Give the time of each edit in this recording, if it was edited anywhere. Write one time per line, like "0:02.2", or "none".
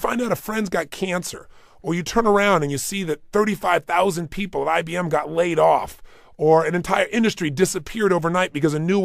none